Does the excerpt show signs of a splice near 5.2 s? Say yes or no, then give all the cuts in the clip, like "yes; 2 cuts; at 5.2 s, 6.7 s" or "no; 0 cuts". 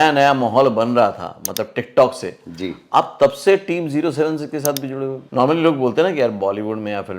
yes; 1 cut; at 5.2 s